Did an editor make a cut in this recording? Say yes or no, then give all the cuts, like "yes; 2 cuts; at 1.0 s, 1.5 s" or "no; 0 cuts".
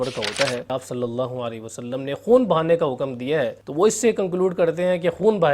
yes; 2 cuts; at 0.7 s, 3.6 s